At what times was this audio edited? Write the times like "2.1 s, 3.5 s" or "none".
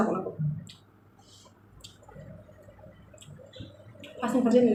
none